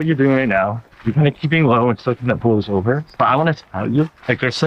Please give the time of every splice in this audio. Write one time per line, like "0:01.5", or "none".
0:03.1